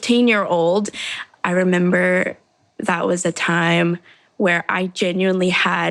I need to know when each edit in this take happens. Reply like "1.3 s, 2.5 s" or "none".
0.9 s